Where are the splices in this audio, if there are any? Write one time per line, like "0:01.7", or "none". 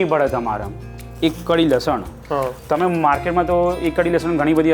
0:01.1